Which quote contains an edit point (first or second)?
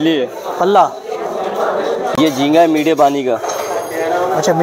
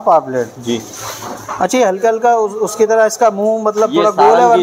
first